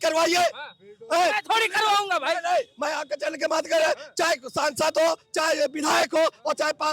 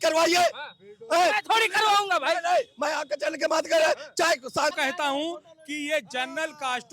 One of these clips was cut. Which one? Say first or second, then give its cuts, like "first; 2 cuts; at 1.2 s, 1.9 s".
second; 1 cut; at 4.8 s